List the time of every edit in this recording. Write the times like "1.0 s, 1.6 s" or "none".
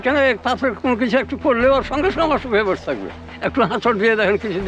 3.3 s

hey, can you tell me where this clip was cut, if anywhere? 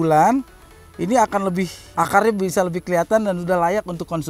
1.8 s

